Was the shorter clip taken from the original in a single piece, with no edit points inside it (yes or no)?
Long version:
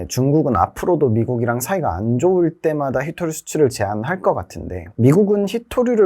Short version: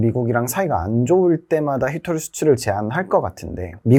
yes